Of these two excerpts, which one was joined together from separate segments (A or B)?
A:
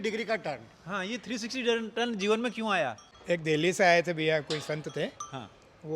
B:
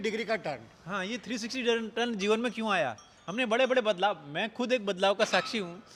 A